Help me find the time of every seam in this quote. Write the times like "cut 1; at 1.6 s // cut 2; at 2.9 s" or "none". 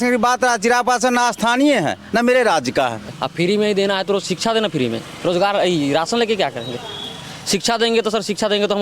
cut 1; at 3.1 s